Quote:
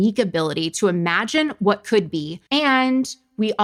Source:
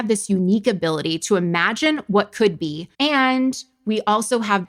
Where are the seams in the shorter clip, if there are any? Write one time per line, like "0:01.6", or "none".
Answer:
none